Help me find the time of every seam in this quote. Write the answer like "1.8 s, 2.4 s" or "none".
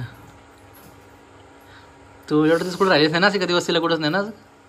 none